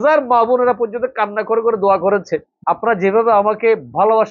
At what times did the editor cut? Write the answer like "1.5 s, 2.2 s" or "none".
2.5 s